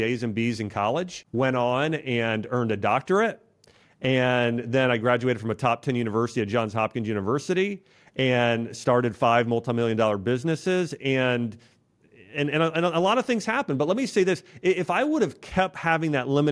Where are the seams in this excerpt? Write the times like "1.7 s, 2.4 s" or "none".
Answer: 1.2 s